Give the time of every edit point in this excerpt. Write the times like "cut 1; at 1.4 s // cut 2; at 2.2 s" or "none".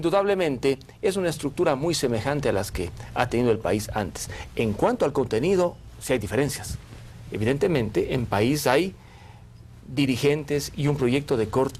cut 1; at 2.5 s

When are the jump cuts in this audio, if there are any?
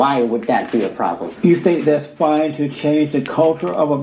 cut 1; at 1.4 s

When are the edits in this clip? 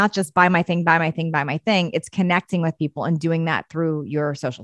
none

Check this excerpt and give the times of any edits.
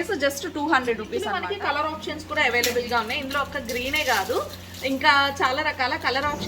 cut 1; at 1.3 s

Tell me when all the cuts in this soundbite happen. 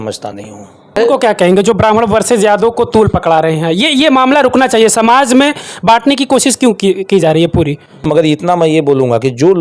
cut 1; at 1.0 s // cut 2; at 8.1 s

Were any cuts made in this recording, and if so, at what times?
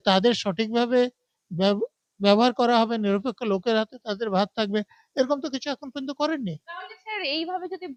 none

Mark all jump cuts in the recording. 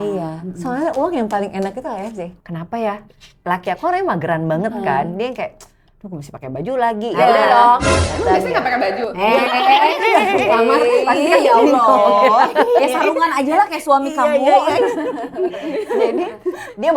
cut 1; at 2.3 s

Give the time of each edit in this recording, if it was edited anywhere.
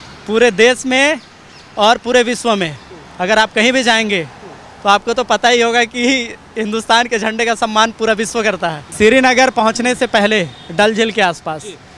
cut 1; at 8.8 s

